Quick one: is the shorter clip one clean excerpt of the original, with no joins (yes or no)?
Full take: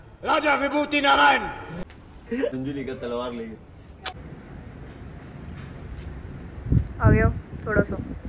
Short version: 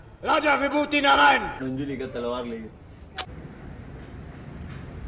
no